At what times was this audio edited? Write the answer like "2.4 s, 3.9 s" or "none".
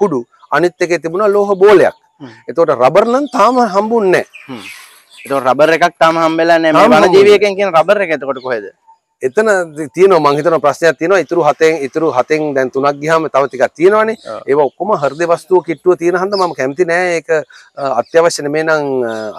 none